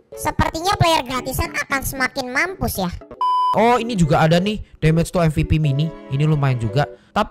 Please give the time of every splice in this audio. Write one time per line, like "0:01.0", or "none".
0:03.1